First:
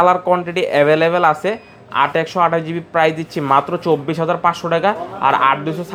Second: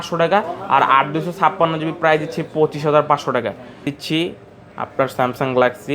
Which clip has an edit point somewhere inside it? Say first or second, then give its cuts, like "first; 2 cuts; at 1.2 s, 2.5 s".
second; 1 cut; at 3.9 s